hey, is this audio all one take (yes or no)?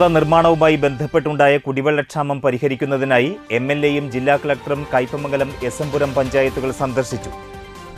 yes